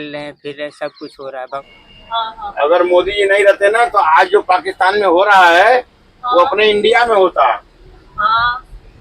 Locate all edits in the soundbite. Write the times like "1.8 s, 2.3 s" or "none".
1.6 s

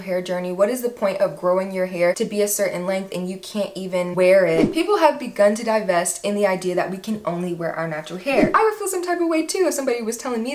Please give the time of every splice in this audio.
4.7 s, 8.5 s

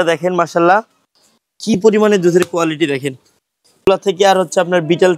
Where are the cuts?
3.9 s

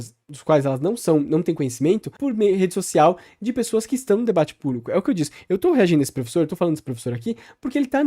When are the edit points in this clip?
2.1 s

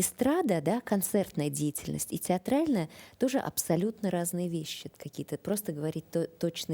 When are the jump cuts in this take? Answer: 4.8 s

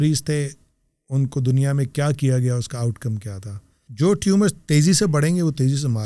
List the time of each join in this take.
3.8 s

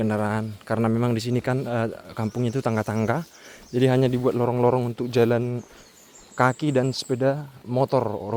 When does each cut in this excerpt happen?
none

